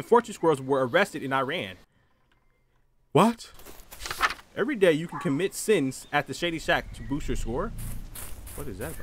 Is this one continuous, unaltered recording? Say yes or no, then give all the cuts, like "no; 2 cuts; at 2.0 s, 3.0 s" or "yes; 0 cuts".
yes; 0 cuts